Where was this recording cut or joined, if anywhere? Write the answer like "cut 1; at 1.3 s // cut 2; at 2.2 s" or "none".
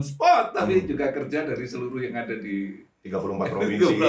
none